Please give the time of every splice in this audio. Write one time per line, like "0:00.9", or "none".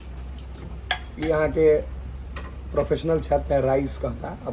none